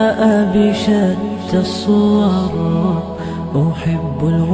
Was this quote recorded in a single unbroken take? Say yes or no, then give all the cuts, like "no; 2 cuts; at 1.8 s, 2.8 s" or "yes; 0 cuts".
yes; 0 cuts